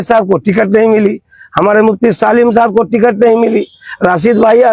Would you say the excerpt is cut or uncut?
uncut